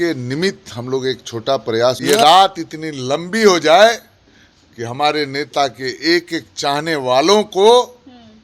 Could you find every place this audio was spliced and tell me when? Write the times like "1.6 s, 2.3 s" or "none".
2.0 s